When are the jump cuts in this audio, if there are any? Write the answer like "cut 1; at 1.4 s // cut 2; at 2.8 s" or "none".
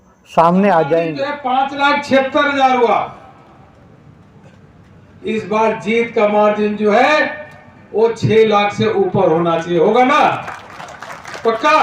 cut 1; at 1.2 s